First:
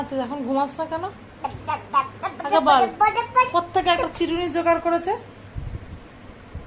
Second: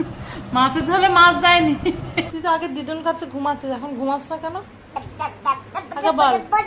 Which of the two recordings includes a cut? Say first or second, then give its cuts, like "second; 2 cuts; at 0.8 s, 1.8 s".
second; 1 cut; at 2.3 s